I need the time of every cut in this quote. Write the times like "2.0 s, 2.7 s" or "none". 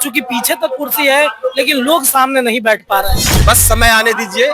3.2 s